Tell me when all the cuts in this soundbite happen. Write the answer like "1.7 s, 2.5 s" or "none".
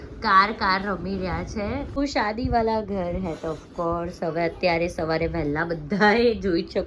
1.9 s